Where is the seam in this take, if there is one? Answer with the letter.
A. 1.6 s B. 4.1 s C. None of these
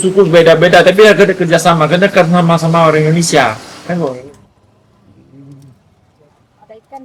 B